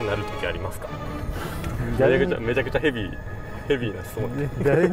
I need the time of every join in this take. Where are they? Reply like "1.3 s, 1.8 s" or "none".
1.0 s